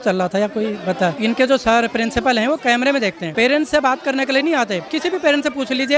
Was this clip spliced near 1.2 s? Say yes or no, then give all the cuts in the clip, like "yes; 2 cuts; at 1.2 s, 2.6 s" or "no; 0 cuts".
yes; 3 cuts; at 1.2 s, 3.2 s, 4.9 s